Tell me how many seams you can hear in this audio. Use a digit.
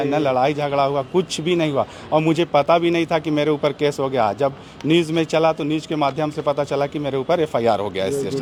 0